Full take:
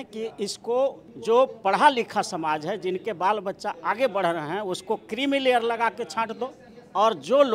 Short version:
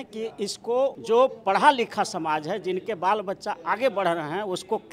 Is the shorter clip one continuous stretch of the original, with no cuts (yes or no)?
no